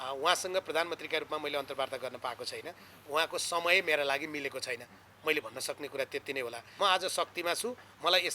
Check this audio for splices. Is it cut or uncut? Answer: cut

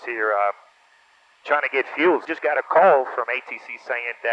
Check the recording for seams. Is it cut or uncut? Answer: cut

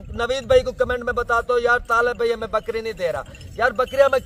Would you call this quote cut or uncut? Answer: uncut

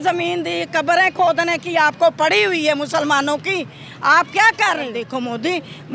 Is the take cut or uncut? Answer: cut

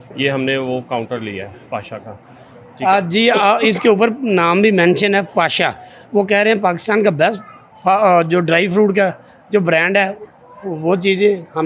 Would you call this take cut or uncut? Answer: uncut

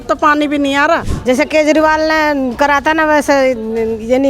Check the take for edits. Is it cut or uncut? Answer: cut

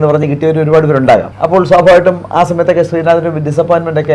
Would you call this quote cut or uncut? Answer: cut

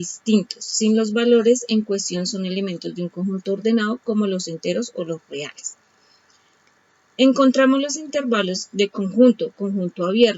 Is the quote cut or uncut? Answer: cut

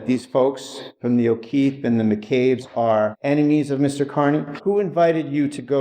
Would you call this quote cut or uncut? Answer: cut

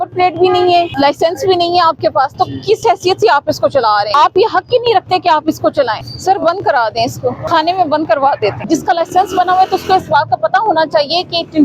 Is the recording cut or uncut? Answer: cut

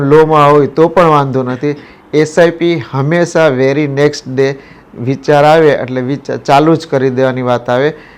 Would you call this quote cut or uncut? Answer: uncut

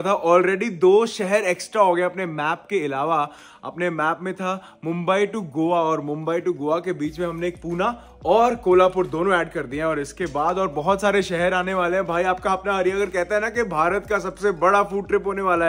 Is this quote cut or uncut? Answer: uncut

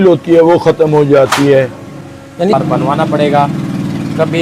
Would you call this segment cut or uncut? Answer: uncut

